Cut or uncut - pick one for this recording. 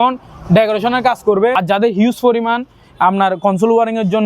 cut